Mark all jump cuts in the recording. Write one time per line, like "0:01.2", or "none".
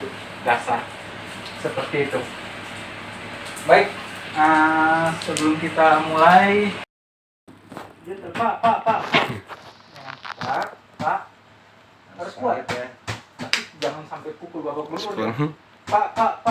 0:07.5